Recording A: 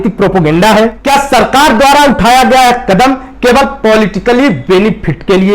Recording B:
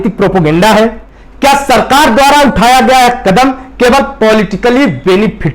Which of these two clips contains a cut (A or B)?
A